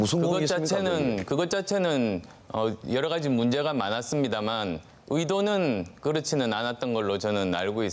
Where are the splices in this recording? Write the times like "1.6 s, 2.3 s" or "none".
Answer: 6.6 s